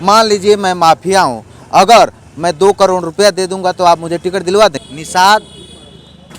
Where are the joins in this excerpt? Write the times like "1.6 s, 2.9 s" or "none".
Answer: 4.8 s